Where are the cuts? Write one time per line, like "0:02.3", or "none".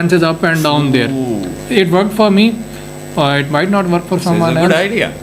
0:01.6